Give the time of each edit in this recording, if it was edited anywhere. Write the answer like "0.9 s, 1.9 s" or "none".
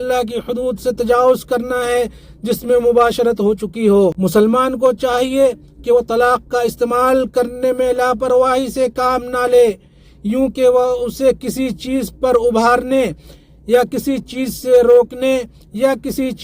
4.2 s